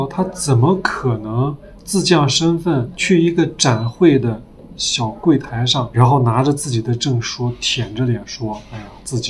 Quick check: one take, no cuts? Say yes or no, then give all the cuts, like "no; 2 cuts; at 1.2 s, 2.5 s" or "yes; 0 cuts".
no; 2 cuts; at 2.9 s, 5.9 s